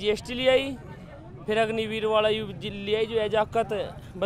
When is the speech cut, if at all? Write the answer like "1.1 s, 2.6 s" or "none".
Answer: none

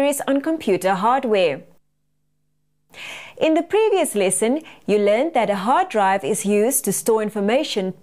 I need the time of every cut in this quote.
6.6 s

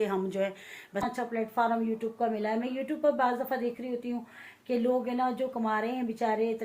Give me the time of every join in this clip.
1.1 s

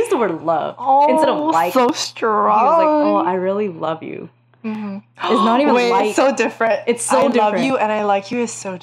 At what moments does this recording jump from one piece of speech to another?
none

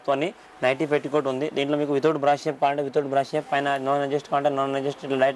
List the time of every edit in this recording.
none

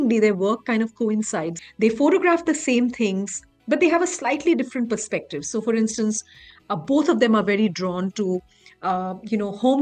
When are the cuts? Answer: 1.6 s

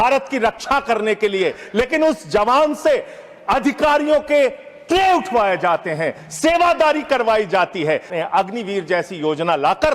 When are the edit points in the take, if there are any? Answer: 8.1 s

